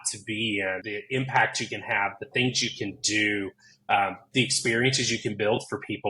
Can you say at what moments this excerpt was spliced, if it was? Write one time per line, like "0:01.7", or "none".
0:00.9